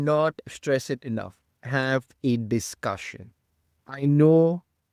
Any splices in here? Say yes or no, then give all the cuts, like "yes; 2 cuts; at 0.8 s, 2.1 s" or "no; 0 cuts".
yes; 1 cut; at 1.5 s